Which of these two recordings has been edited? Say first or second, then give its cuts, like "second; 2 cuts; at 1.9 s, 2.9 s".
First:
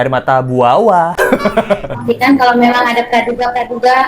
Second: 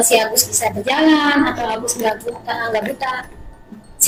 first; 1 cut; at 2.0 s